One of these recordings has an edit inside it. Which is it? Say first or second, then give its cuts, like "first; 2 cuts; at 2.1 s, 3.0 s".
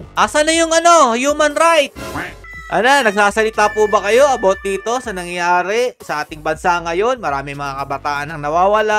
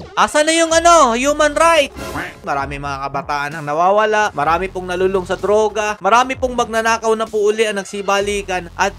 second; 1 cut; at 2.5 s